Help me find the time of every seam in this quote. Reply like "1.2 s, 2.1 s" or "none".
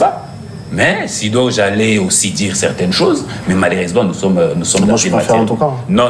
none